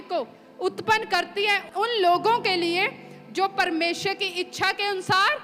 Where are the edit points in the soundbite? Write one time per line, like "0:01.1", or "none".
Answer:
0:01.6